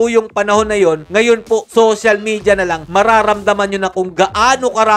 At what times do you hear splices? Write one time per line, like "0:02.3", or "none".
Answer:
0:01.0